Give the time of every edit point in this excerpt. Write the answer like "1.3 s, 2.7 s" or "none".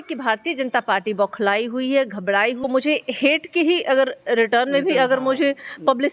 2.7 s